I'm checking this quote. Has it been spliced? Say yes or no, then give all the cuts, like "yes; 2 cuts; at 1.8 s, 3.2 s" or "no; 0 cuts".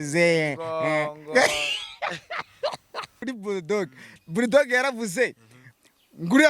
yes; 1 cut; at 3.2 s